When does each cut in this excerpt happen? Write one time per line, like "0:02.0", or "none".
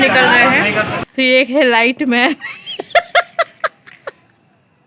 0:01.0